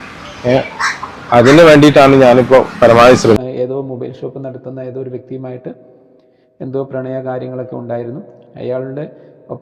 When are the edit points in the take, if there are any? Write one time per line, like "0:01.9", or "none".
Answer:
0:03.4